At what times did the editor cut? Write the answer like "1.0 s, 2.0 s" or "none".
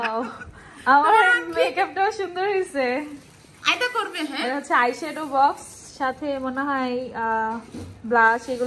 none